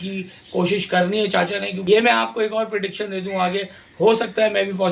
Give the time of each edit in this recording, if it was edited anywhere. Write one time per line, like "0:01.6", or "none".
0:01.7

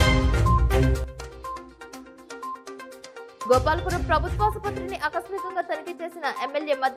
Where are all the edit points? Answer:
none

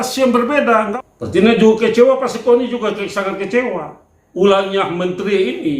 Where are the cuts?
0:00.9

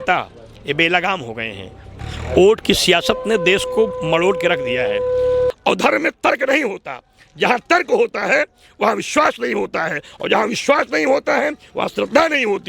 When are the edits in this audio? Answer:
0:02.0
0:05.5

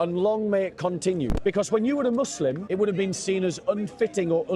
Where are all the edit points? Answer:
0:01.3
0:02.6

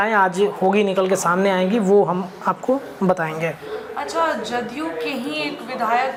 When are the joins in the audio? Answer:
none

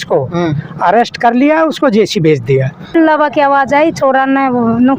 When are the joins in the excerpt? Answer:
0:02.9

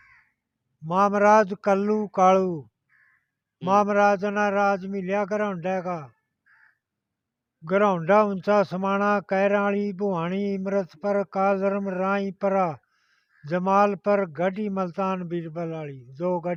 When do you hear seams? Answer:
none

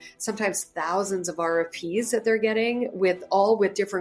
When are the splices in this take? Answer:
none

